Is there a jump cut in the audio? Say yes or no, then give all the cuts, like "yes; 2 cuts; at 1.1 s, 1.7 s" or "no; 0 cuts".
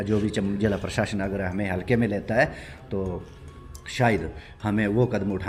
no; 0 cuts